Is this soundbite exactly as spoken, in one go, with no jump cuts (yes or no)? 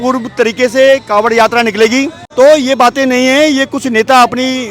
no